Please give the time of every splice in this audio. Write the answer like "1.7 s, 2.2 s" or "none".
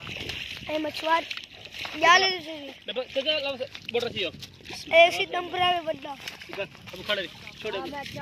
none